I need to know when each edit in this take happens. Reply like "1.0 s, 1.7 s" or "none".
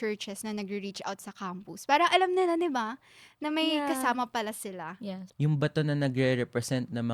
5.2 s

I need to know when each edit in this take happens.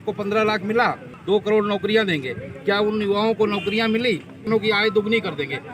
1.1 s, 4.4 s

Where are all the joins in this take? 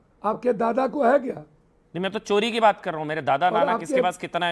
none

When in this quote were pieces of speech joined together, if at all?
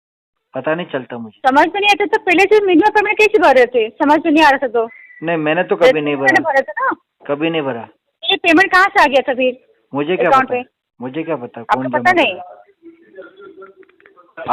none

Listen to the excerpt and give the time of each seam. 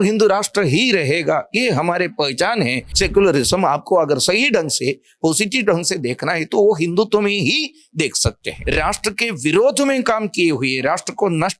2.8 s, 8.5 s

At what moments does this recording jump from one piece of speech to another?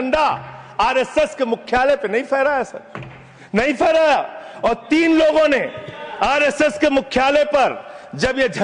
none

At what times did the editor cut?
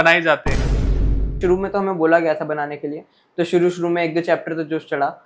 1.0 s

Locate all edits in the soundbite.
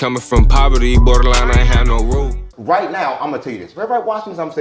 2.4 s

